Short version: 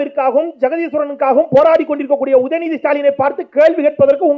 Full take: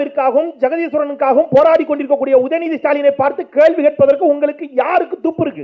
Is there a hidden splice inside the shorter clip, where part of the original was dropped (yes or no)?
no